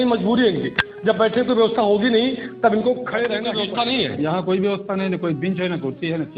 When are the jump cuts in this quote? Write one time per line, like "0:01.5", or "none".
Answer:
0:03.5